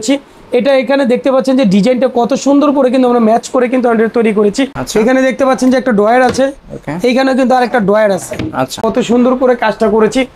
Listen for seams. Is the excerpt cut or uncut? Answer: cut